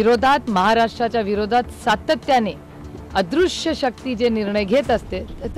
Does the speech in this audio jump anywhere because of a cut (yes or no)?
no